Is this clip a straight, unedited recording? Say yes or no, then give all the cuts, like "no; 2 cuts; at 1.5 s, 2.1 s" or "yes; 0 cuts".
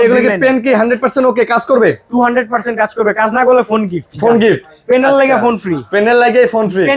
yes; 0 cuts